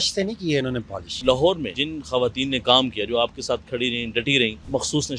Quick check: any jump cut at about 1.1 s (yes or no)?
yes